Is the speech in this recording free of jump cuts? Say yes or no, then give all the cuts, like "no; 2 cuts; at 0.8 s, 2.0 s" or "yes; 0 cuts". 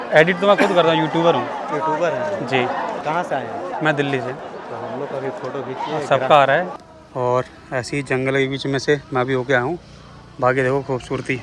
no; 3 cuts; at 3.0 s, 4.4 s, 6.8 s